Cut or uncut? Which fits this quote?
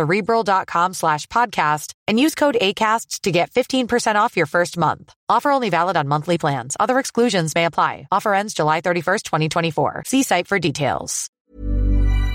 cut